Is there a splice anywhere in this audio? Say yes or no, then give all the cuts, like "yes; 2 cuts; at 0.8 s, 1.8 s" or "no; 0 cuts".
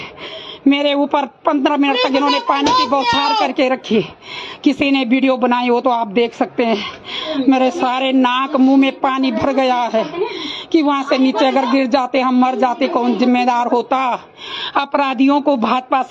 no; 0 cuts